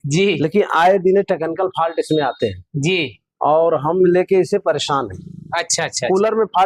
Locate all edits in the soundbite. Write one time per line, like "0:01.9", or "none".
none